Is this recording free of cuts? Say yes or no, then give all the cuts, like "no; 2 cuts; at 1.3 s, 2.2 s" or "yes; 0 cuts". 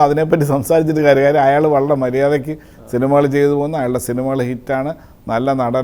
yes; 0 cuts